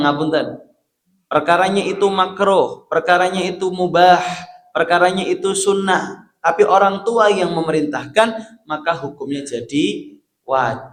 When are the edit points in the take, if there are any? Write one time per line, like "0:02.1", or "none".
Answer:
none